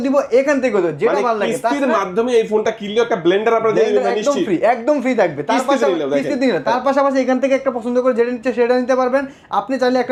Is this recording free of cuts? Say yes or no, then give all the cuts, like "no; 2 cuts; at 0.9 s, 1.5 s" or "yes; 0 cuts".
yes; 0 cuts